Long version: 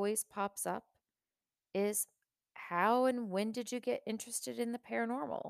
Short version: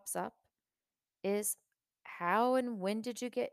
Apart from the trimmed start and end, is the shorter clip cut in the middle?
no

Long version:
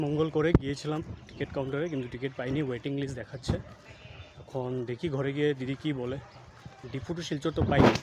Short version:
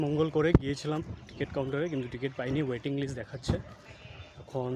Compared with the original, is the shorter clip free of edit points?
yes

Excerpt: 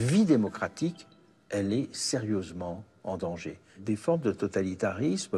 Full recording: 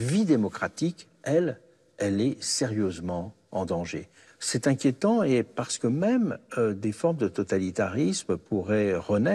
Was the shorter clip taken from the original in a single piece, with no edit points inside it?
no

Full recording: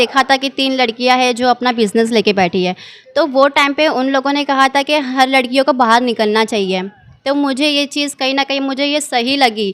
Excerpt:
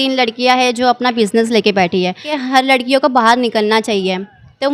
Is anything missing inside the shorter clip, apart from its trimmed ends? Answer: yes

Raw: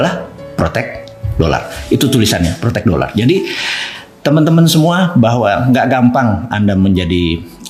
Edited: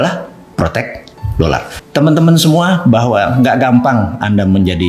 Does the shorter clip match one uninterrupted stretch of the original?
no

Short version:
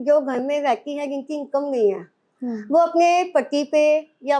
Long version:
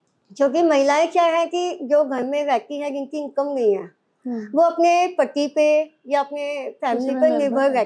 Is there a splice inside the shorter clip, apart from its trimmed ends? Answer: no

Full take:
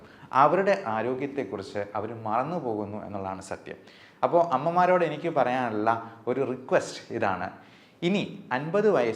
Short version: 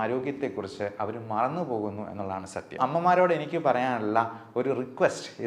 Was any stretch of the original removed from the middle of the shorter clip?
yes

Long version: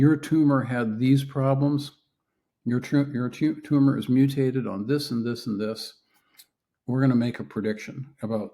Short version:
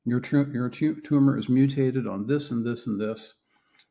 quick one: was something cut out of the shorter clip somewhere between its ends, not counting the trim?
no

